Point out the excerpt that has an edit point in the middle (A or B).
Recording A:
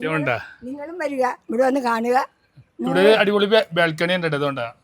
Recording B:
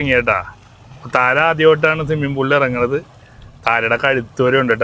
A